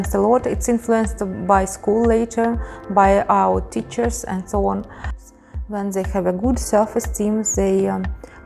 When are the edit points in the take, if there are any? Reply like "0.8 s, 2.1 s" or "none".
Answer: 5.2 s